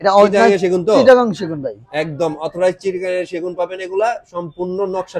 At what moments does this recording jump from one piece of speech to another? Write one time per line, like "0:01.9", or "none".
none